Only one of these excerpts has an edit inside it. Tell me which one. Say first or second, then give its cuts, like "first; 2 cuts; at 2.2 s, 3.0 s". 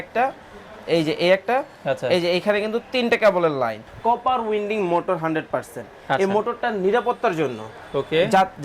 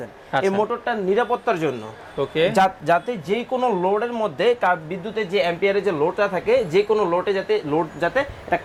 first; 1 cut; at 3.9 s